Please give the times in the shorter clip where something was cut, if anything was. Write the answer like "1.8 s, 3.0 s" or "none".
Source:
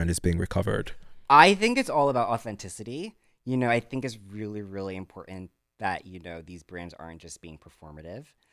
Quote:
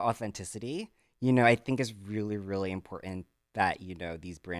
none